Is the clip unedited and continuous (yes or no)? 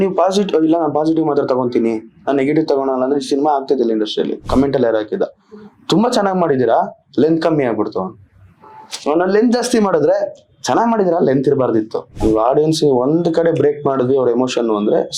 no